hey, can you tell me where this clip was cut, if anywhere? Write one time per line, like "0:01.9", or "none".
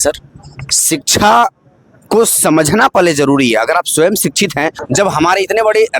0:04.8